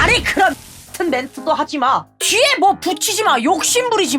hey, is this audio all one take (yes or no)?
yes